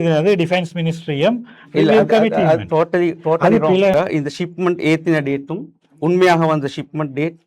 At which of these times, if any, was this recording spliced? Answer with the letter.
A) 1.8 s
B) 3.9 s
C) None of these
B